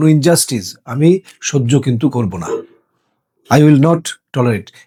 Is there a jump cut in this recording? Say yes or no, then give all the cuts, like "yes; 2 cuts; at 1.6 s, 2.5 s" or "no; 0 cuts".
no; 0 cuts